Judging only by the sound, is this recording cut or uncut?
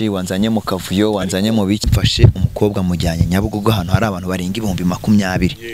cut